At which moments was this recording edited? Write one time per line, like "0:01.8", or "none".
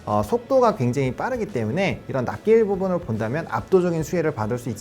none